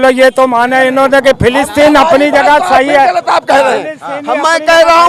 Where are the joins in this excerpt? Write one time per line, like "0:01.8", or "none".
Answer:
none